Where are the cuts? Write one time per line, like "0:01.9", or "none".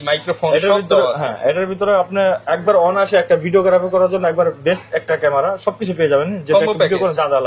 none